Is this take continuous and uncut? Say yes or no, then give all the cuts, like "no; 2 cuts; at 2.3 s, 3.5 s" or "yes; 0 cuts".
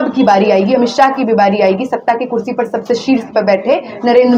yes; 0 cuts